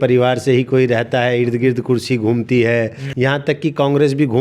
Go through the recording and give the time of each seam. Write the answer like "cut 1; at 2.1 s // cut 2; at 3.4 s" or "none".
cut 1; at 3.0 s